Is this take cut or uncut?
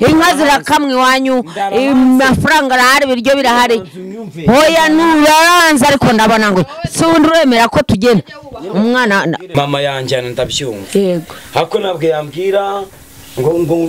uncut